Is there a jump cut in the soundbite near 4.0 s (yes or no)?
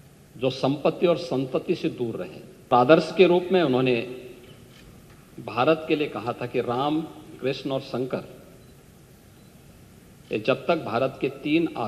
no